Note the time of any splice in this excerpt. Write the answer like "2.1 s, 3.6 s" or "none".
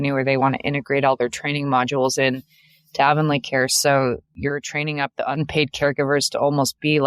4.3 s